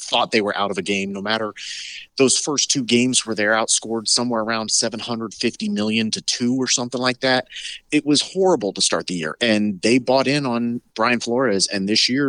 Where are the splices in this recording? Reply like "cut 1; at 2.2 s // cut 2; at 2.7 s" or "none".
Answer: cut 1; at 7.7 s